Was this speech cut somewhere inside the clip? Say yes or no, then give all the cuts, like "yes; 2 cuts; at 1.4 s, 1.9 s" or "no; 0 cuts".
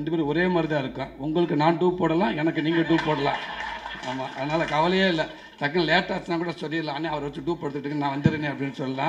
no; 0 cuts